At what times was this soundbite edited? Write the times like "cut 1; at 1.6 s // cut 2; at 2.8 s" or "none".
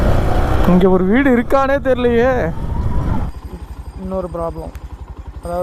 cut 1; at 3.3 s